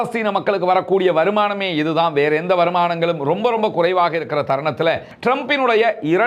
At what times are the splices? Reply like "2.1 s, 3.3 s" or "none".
5.1 s